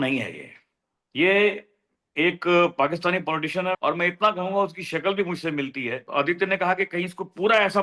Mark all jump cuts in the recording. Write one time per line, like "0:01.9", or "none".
0:03.8
0:06.0